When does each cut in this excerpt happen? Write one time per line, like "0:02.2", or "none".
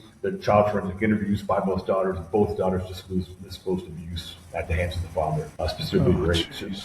0:05.5